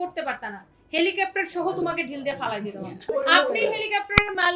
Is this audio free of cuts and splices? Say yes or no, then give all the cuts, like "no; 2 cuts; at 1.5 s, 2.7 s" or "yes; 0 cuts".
no; 1 cut; at 3.1 s